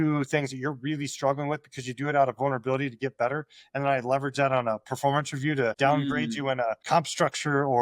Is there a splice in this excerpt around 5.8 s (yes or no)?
yes